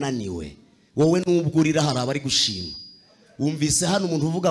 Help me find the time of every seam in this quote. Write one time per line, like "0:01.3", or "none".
none